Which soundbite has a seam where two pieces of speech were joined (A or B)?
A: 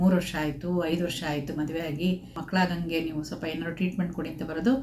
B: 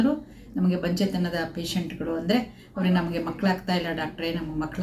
A